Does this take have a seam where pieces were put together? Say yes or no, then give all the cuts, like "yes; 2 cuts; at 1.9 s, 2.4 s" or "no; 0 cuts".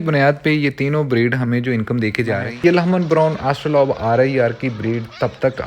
yes; 1 cut; at 2.5 s